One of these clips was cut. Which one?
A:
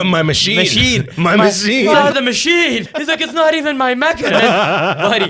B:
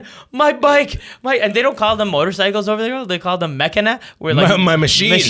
A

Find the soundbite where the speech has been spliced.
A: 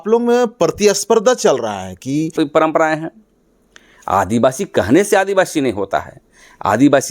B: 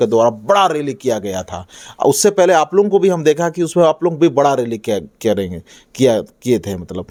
A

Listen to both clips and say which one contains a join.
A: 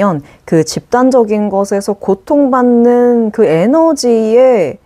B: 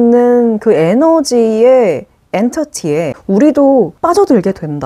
B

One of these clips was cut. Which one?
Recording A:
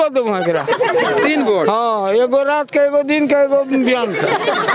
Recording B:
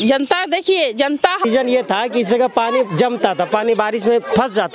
B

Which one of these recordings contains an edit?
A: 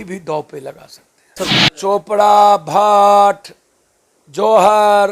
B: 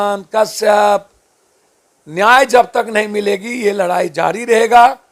A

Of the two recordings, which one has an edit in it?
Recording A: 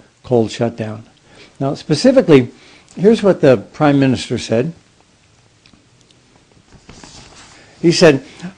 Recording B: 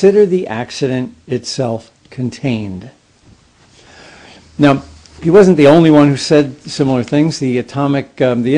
B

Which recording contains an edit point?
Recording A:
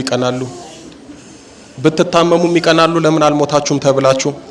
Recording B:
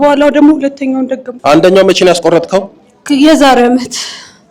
B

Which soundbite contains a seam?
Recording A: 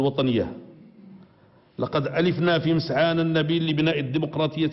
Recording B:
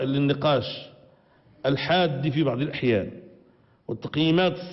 A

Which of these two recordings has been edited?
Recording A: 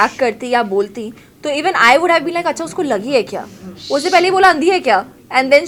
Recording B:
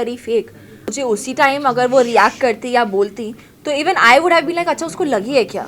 B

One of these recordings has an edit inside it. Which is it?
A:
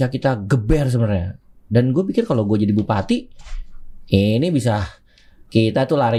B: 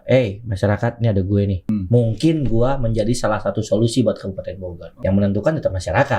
B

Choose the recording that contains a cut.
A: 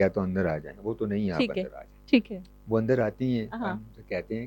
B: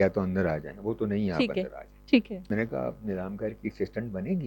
B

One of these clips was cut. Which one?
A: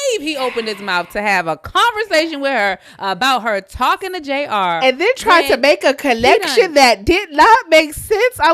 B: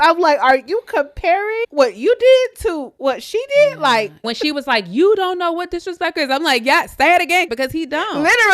B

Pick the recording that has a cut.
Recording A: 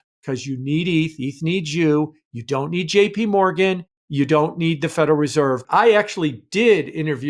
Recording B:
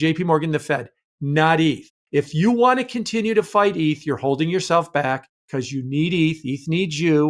A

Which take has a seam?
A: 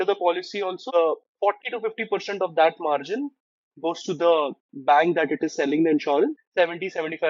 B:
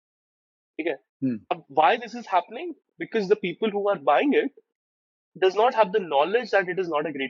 A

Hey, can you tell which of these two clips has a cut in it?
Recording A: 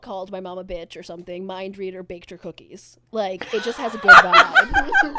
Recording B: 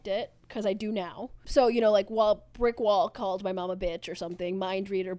B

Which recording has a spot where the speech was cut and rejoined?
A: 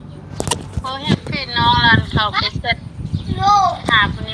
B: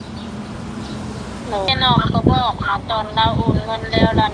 B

